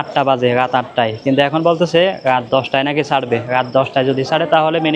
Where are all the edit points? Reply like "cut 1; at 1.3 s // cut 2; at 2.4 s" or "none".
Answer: none

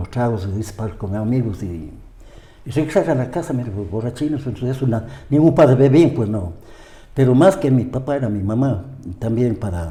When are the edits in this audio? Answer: none

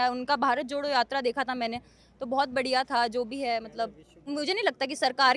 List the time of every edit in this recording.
cut 1; at 4.2 s

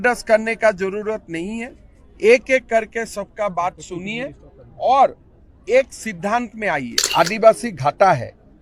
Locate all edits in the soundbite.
cut 1; at 6.9 s

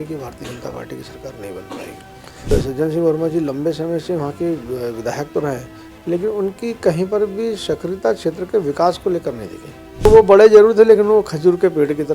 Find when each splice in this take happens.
cut 1; at 2.5 s // cut 2; at 10.1 s

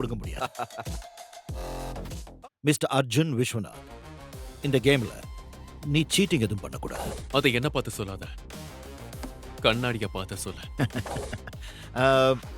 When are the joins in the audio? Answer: cut 1; at 2.2 s

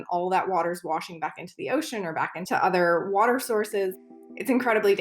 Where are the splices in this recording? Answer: cut 1; at 2.4 s // cut 2; at 4.0 s

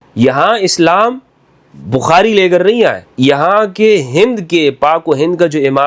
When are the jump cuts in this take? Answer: cut 1; at 3.0 s

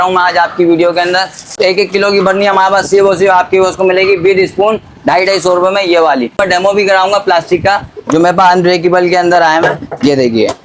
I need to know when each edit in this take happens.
cut 1; at 1.5 s // cut 2; at 6.4 s

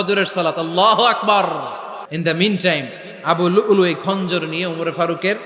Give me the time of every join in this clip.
cut 1; at 2.1 s

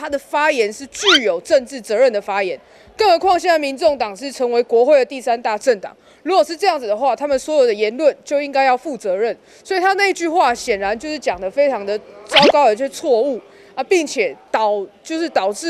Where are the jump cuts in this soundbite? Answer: none

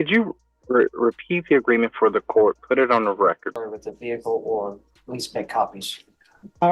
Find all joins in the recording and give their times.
cut 1; at 3.6 s

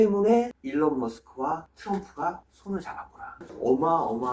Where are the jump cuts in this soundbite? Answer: cut 1; at 3.4 s

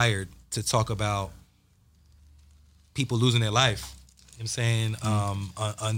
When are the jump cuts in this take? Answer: none

